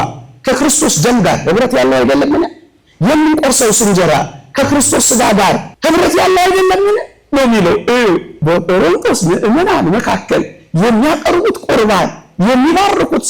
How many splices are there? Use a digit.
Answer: 2